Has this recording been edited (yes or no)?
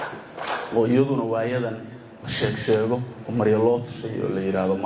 no